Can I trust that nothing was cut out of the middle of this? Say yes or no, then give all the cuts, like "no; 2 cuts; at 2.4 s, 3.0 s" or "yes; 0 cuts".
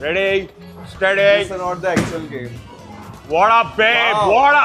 yes; 0 cuts